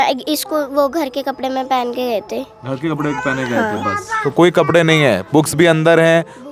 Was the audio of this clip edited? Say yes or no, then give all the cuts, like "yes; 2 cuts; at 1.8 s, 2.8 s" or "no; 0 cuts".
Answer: no; 0 cuts